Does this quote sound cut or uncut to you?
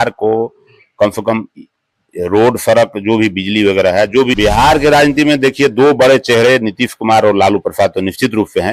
cut